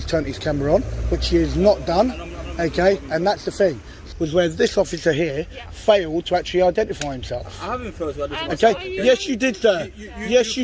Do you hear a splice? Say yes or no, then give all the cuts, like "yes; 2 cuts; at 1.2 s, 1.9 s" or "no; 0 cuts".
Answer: yes; 1 cut; at 4.0 s